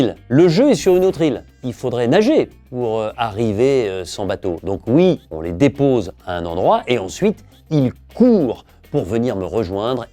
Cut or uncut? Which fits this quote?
cut